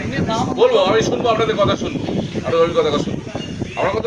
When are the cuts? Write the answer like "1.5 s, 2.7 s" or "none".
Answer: none

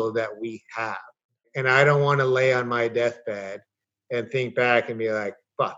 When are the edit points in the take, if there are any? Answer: 1.5 s

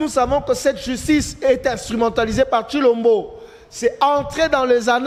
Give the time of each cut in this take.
none

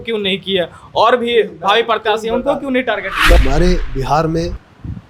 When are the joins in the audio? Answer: 3.4 s

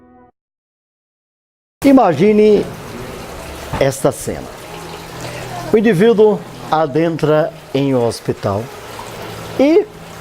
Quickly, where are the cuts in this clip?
7.6 s

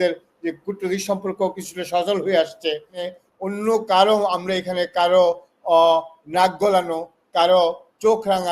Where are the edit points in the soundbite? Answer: 3.1 s

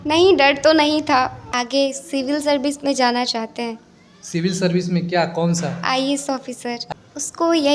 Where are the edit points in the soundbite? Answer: 1.6 s, 6.5 s

